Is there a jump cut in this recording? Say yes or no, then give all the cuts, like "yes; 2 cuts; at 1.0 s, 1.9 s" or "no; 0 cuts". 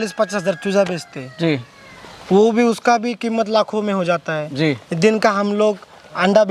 no; 0 cuts